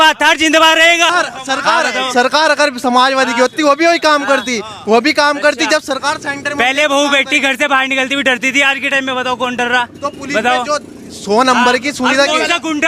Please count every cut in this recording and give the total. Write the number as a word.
one